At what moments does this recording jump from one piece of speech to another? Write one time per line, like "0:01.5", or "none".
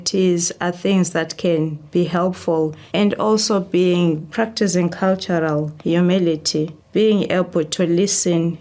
0:01.8
0:02.8
0:04.3
0:05.7
0:06.8